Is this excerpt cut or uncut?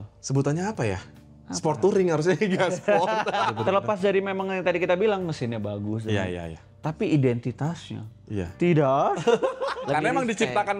cut